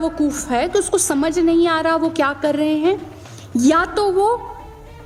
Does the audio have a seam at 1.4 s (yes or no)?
no